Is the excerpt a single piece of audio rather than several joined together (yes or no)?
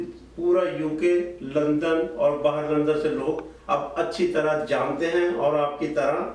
yes